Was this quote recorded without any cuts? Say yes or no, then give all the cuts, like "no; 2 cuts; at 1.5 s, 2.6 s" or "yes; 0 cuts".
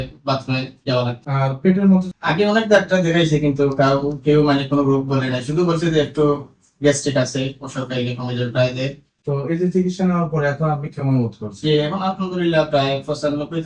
no; 2 cuts; at 2.1 s, 9.1 s